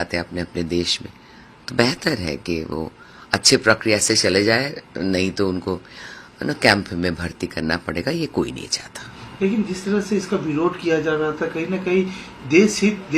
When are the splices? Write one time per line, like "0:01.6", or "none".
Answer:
none